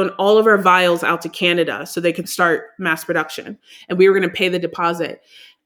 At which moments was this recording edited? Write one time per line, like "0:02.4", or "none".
0:02.2